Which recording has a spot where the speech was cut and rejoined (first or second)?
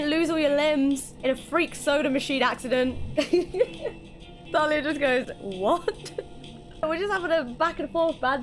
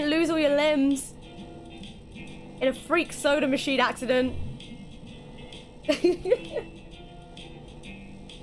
first